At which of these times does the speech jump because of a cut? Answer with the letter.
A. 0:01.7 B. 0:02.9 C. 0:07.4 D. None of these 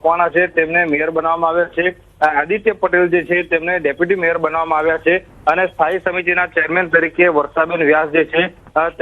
C